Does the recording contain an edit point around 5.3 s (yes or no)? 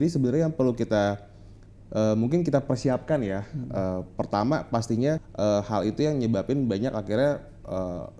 yes